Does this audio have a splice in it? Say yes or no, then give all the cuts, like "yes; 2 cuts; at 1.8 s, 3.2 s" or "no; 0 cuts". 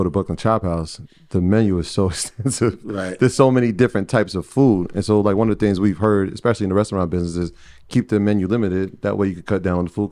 no; 0 cuts